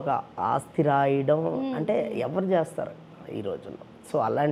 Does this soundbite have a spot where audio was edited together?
no; 0 cuts

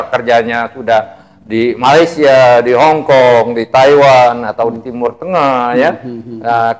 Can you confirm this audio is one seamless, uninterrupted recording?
yes; 0 cuts

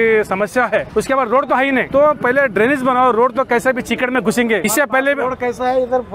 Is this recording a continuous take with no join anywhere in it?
no; 3 cuts; at 0.9 s, 1.9 s, 4.6 s

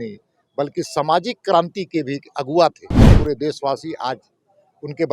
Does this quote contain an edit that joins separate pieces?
yes; 1 cut; at 3.1 s

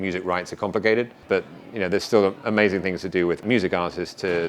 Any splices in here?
yes; 2 cuts; at 1.2 s, 3.4 s

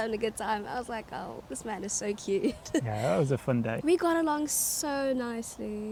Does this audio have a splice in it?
no; 0 cuts

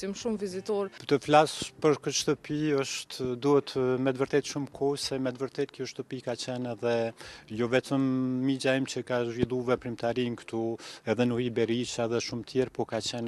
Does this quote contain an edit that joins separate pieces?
yes; 1 cut; at 0.9 s

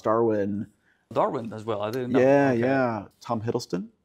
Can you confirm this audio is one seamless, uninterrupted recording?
yes; 0 cuts

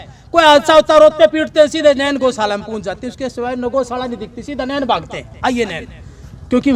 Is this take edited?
no; 0 cuts

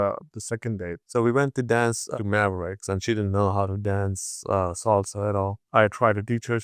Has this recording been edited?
yes; 1 cut; at 0.9 s

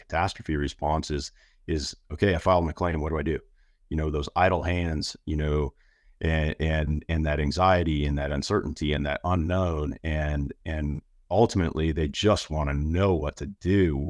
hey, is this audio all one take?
yes; 0 cuts

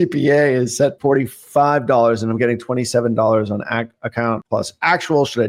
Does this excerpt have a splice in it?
yes; 2 cuts; at 1.0 s, 4.4 s

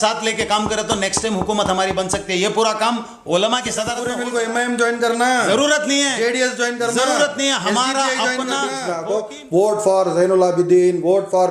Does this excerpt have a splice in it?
yes; 2 cuts; at 4.0 s, 8.9 s

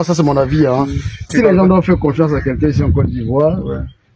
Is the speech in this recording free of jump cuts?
no; 1 cut; at 1.3 s

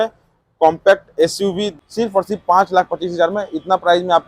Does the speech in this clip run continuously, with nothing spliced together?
no; 1 cut; at 1.7 s

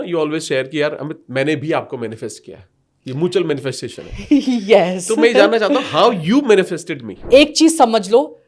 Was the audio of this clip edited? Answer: yes; 1 cut; at 7.2 s

